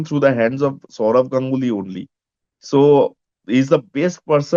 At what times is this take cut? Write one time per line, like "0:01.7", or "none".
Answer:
none